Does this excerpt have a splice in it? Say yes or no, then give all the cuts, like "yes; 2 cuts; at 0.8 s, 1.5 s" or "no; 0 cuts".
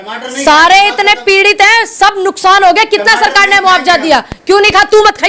no; 0 cuts